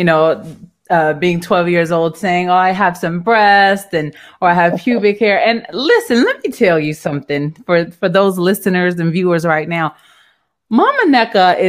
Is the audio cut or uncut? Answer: uncut